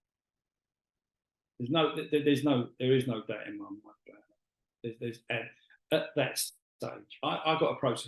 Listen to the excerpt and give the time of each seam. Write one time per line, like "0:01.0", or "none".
0:07.0